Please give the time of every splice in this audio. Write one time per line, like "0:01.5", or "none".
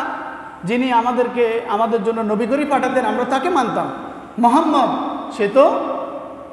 none